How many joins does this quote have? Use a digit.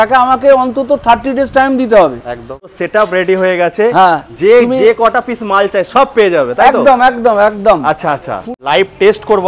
2